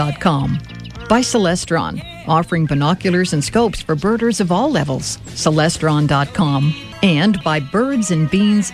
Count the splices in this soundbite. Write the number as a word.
one